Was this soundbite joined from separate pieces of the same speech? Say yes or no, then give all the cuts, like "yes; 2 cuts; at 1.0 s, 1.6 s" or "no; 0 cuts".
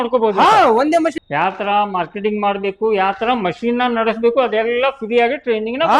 yes; 1 cut; at 1.2 s